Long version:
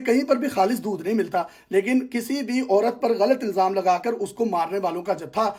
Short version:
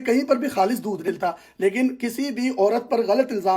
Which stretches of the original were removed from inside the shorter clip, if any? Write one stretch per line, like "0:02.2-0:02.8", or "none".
0:01.1-0:01.2